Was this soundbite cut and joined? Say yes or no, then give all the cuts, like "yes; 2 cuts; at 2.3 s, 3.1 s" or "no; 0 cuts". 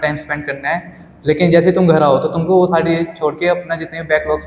no; 0 cuts